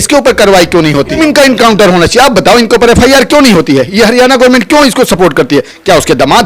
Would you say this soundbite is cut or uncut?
cut